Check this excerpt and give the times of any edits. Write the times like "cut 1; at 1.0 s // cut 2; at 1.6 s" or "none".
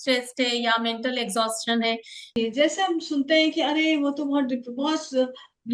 cut 1; at 2.3 s